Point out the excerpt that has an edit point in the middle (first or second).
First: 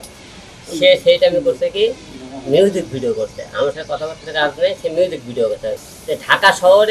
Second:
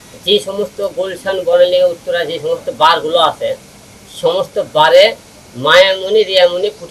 first